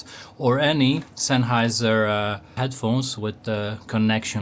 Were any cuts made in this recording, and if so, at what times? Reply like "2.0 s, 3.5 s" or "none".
2.5 s